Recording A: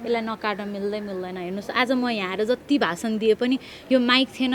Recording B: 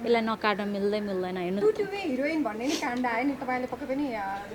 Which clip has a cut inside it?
B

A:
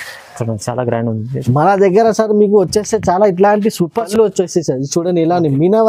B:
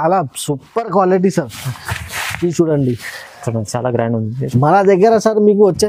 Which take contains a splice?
A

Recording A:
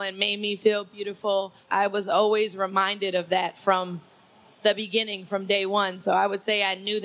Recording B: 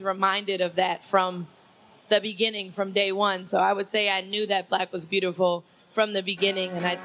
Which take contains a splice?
A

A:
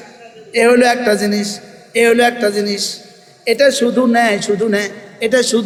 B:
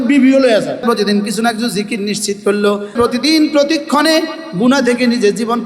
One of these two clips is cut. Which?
B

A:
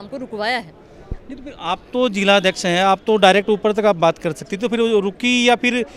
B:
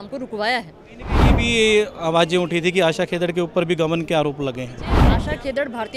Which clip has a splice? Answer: B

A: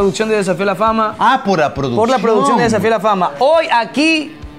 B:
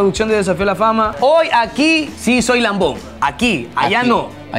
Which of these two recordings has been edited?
B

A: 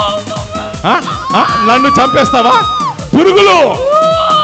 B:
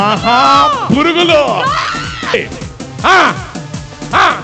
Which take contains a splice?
B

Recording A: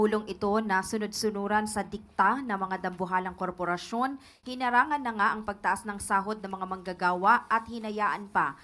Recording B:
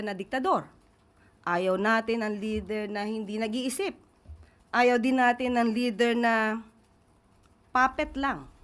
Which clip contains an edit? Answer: A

